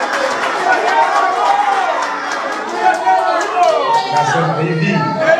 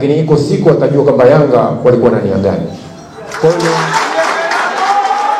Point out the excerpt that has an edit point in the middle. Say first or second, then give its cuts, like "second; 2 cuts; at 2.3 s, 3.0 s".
second; 1 cut; at 3.7 s